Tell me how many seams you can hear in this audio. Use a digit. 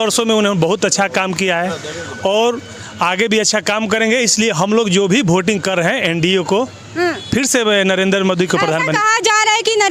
0